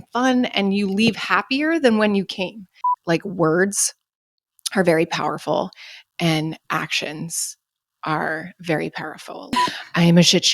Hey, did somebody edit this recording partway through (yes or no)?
yes